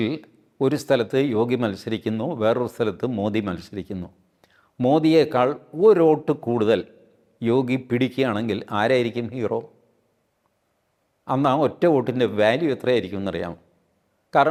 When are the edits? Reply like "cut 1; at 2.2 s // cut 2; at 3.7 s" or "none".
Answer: none